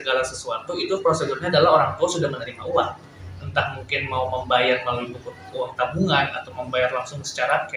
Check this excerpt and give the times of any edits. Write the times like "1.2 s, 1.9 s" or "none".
none